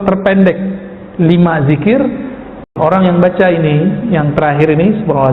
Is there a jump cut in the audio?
yes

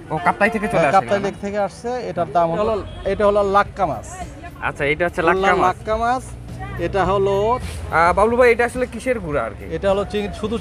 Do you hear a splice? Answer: yes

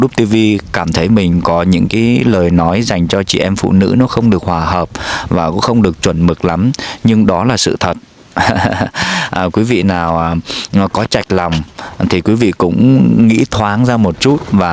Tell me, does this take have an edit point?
no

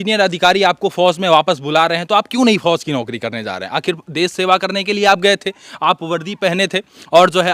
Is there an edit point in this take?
no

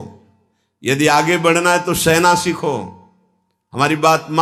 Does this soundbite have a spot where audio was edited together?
no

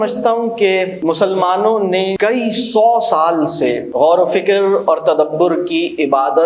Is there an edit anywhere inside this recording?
yes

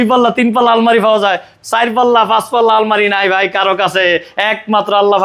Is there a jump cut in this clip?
no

